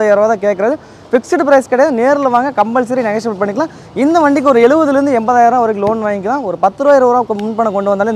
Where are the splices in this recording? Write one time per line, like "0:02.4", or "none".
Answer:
none